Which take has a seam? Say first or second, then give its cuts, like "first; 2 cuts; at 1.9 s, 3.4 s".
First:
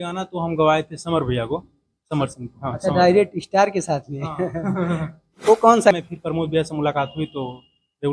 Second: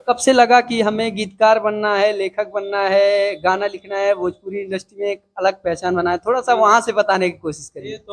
first; 1 cut; at 5.9 s